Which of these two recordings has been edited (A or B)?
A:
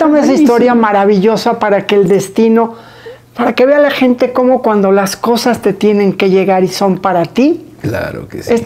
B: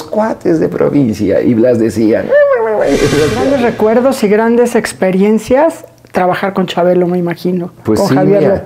B